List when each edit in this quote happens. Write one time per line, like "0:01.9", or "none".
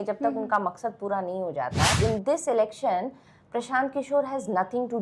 0:01.9